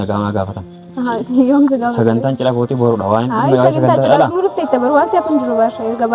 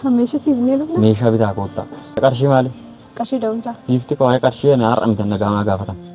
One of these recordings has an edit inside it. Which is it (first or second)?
second